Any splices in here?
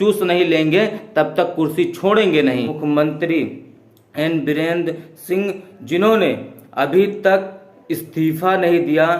yes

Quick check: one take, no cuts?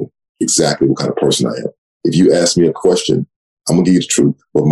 no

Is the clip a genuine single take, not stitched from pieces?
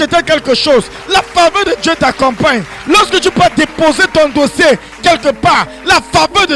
yes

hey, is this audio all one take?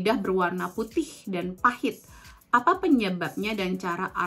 yes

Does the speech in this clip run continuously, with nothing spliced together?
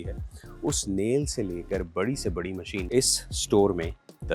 no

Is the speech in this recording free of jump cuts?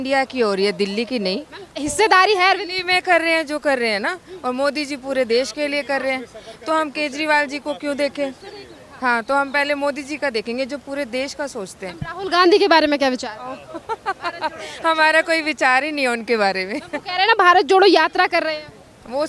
yes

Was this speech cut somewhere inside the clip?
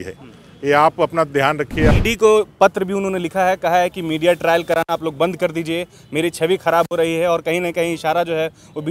yes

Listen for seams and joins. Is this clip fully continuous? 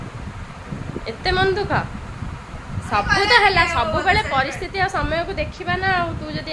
yes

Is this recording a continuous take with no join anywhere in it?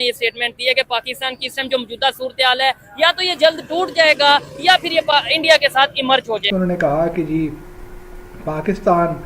no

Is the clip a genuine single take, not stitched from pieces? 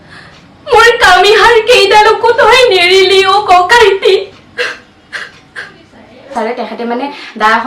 no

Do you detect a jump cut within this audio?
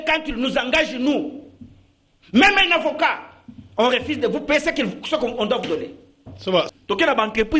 yes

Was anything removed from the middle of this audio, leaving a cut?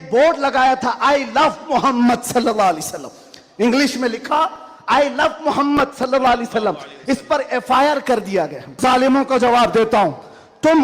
yes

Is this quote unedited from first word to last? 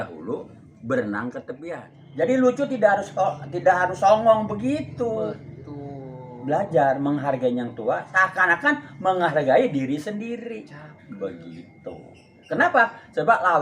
no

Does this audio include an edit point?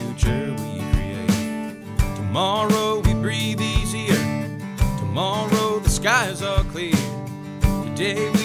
no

